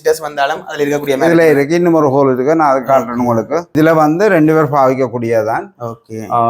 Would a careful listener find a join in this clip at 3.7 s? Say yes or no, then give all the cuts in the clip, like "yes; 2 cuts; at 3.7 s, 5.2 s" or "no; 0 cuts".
yes; 1 cut; at 3.7 s